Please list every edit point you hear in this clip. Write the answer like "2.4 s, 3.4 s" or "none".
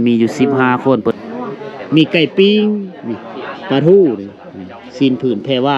1.0 s